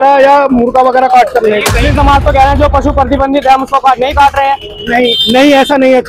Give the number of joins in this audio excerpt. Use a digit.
1